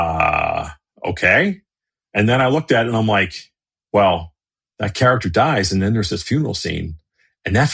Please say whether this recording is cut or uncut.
uncut